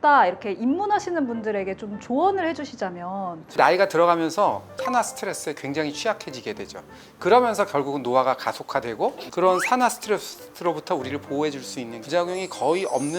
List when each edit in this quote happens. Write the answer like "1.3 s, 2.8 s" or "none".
3.6 s, 4.7 s, 9.2 s